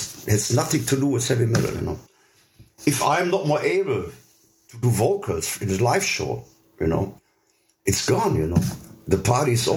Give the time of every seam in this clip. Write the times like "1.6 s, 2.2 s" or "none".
none